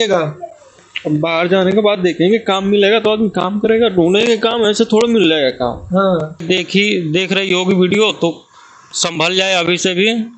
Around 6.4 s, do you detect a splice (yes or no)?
yes